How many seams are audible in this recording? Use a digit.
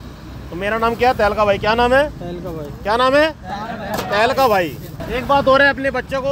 1